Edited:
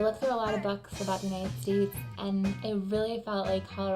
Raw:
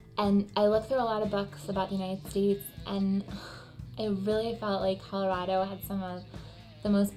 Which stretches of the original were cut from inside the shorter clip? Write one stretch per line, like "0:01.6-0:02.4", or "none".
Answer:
0:03.3-0:03.9